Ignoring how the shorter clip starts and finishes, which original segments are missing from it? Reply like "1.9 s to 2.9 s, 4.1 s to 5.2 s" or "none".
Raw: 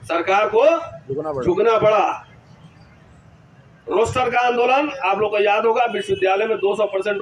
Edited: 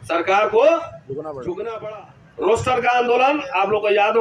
1.8 s to 3.3 s